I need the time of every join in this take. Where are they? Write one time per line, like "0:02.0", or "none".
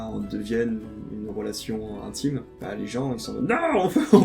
0:02.5